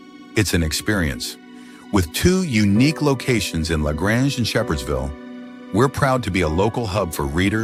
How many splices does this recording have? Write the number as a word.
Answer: zero